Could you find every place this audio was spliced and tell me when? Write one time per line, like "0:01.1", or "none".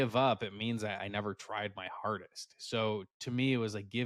none

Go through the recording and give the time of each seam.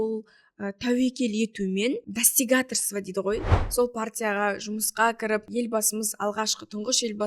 0:02.1
0:03.5
0:05.5

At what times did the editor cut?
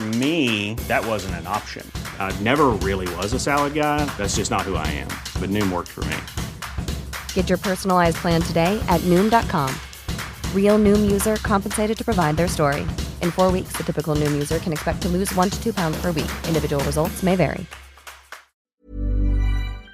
0:18.8

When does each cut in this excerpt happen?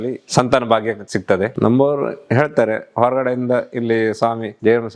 none

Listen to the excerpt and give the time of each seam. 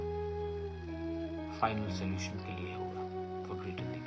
none

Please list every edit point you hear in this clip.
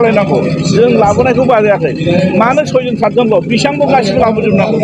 none

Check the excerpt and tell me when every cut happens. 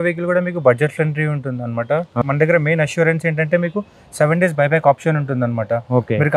0:02.2

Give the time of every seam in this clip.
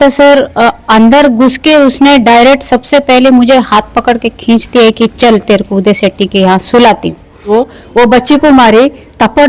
0:07.5

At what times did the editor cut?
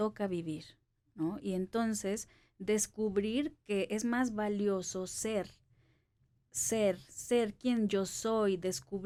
none

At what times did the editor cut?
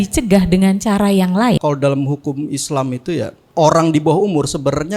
0:01.6
0:03.4

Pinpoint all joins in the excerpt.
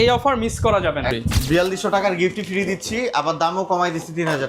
0:01.2

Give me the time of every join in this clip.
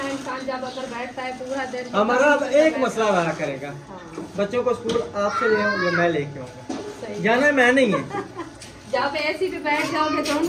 none

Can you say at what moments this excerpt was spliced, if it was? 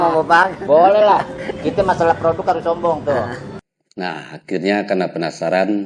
0:03.4

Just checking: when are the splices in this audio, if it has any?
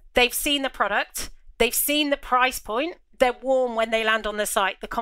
0:03.0

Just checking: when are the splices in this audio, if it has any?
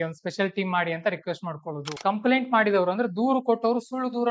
0:02.0

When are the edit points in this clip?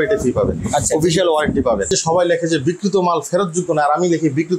0:01.9

